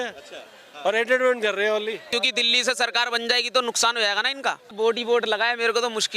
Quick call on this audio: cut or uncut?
cut